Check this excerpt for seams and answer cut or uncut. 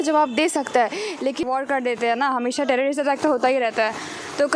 cut